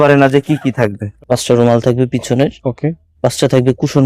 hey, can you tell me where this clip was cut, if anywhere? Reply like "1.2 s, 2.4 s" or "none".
1.1 s